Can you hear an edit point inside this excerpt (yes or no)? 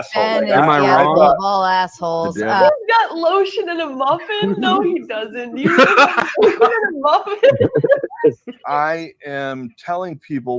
yes